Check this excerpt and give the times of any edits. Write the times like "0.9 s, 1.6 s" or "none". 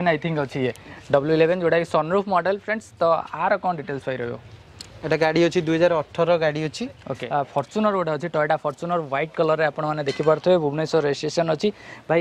7.1 s